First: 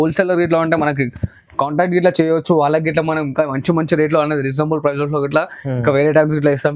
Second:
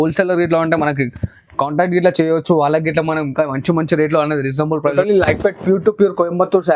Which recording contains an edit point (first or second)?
second